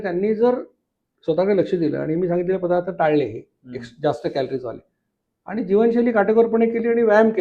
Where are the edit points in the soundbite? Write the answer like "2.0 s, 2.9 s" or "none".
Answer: none